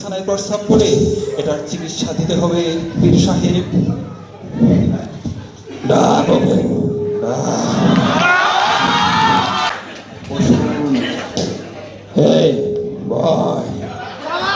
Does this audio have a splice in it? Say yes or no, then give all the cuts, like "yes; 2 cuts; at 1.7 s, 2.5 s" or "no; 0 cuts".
yes; 1 cut; at 9.7 s